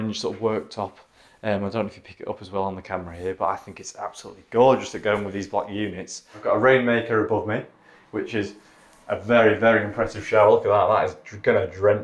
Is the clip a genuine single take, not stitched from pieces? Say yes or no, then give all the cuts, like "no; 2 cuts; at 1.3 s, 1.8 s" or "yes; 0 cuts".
no; 1 cut; at 6.4 s